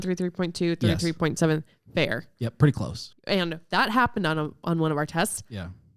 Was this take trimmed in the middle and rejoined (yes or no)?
yes